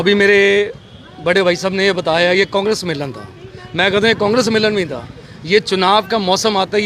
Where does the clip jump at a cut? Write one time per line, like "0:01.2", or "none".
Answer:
none